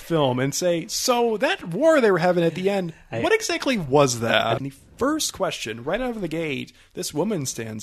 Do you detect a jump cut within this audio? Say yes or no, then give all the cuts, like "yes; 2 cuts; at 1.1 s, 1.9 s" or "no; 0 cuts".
yes; 2 cuts; at 1.7 s, 4.6 s